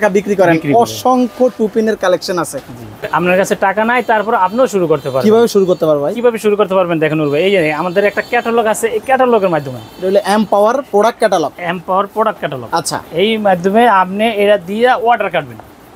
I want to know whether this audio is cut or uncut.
cut